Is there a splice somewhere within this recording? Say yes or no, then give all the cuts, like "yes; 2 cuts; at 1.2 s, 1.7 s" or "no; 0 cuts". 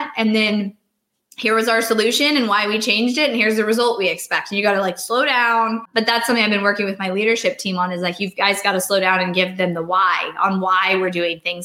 yes; 1 cut; at 5.9 s